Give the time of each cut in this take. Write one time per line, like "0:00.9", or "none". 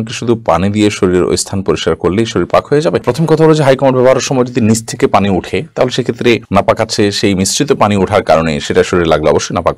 none